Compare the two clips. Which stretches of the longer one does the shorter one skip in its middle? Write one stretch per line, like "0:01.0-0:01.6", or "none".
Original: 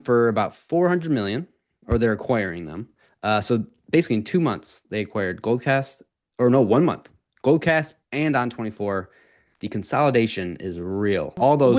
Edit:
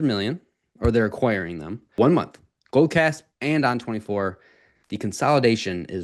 0:03.0-0:06.7